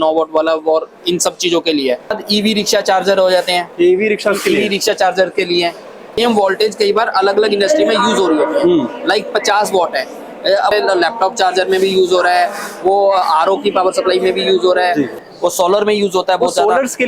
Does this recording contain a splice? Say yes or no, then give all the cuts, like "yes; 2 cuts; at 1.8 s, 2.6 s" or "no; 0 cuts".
yes; 4 cuts; at 2.1 s, 6.2 s, 10.7 s, 15.2 s